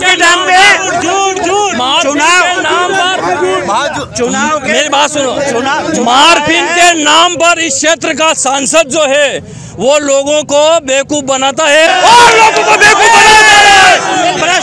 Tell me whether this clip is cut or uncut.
cut